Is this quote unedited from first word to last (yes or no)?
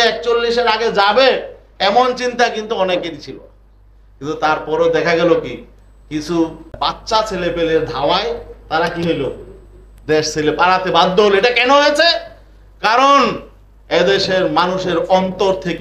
no